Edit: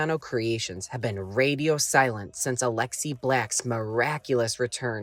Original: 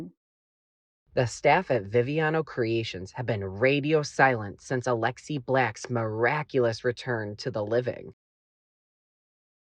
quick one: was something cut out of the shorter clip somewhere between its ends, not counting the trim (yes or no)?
no